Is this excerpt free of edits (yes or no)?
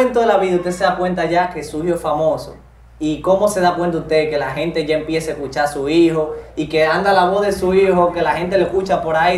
yes